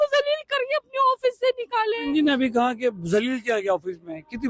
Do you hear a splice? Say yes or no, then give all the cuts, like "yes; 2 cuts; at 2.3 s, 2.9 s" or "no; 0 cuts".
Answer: yes; 1 cut; at 2.0 s